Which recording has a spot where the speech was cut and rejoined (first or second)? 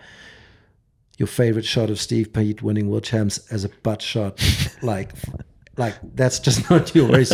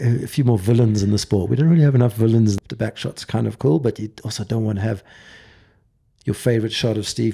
second